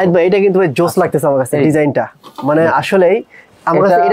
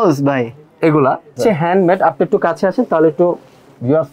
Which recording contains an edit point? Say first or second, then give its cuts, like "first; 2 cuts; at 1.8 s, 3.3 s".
second; 1 cut; at 1.4 s